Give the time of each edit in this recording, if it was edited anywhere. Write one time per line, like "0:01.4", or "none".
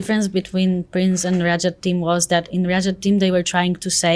none